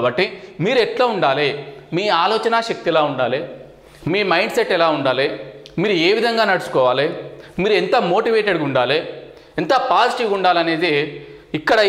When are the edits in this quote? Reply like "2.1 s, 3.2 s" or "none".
none

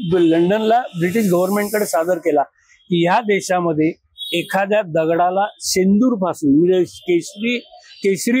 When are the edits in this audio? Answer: none

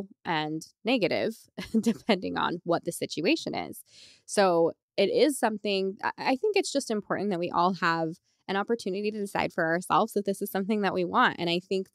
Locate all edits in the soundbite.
none

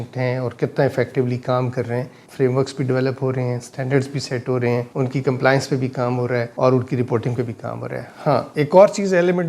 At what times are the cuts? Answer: 2.2 s

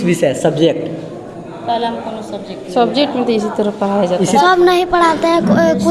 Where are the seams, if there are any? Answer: 4.4 s

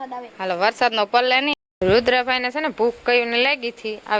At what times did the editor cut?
1.6 s

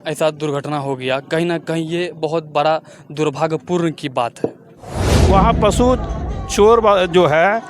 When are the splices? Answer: 5.1 s

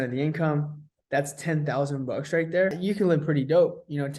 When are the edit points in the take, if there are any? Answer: 2.8 s

